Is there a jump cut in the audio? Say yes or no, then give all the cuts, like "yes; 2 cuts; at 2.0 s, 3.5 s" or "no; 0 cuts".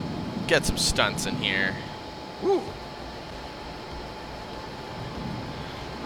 no; 0 cuts